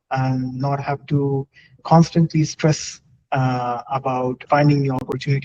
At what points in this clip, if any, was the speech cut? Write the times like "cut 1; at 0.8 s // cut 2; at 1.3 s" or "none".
cut 1; at 1.8 s // cut 2; at 4.4 s

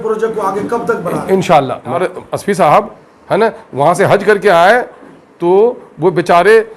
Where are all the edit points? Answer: cut 1; at 2.0 s

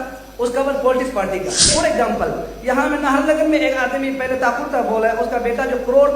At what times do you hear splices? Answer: cut 1; at 1.7 s

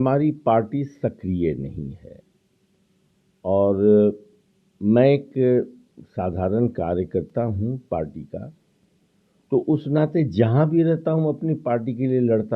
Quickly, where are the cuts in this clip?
none

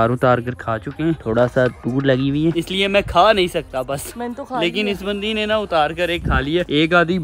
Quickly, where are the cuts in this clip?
none

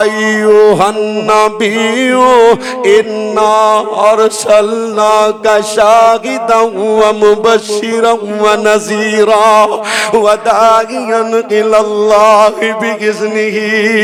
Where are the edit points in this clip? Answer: none

